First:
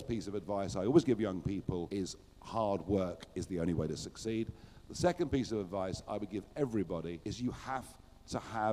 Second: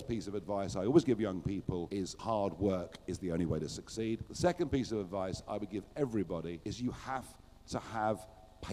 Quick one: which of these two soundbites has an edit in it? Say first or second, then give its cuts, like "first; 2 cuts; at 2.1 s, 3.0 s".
second; 2 cuts; at 2.1 s, 4.3 s